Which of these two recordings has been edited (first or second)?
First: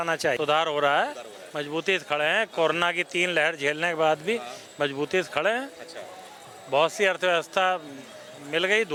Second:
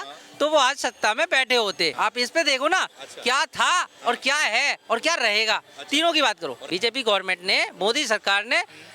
second